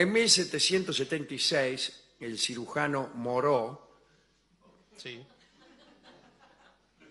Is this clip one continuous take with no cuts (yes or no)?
yes